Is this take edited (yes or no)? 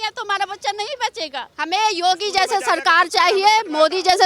yes